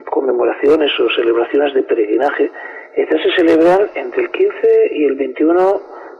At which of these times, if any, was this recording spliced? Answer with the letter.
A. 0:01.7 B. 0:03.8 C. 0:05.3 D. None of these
D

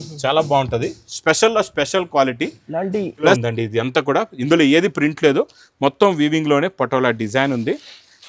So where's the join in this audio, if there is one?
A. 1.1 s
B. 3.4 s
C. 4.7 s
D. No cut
B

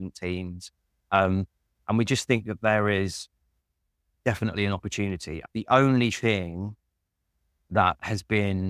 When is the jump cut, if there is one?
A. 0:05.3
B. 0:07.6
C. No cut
A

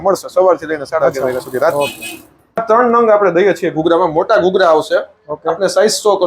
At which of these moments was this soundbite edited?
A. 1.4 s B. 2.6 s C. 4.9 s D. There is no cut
B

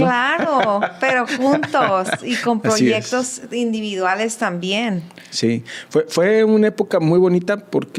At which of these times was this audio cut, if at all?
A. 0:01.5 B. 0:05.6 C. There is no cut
C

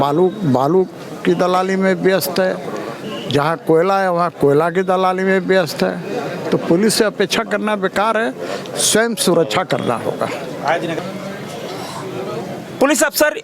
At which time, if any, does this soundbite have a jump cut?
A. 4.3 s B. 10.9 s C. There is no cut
B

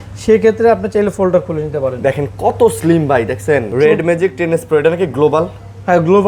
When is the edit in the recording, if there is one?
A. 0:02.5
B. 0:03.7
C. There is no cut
B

